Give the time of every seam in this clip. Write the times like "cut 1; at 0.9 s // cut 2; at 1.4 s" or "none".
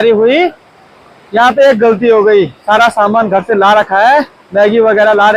none